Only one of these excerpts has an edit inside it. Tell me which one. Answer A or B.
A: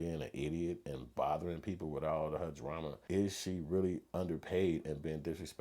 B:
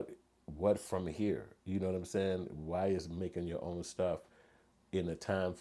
A